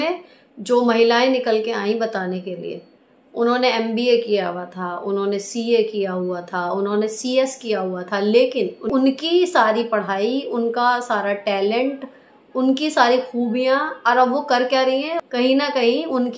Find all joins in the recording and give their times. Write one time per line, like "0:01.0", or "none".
0:08.9
0:15.2